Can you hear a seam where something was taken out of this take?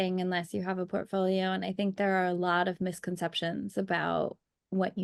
no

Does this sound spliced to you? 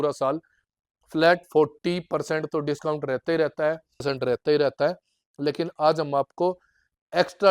yes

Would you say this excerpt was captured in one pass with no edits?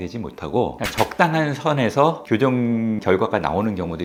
yes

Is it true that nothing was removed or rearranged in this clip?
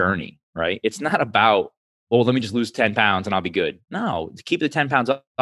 yes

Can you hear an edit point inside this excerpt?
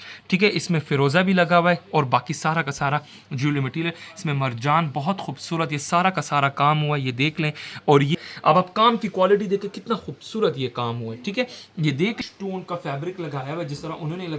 yes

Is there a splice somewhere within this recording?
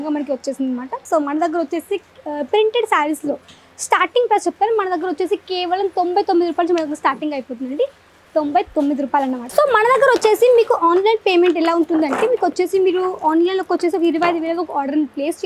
yes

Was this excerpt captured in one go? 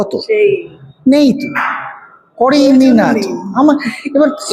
yes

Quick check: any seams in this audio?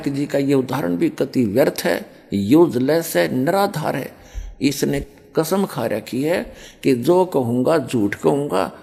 no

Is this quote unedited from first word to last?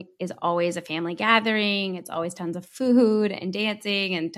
yes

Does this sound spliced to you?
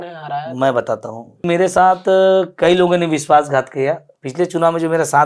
yes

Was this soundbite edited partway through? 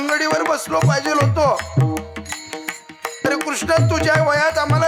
no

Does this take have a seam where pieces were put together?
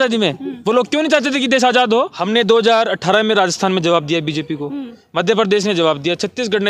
yes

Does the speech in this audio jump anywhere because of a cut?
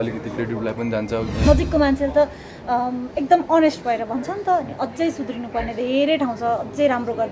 yes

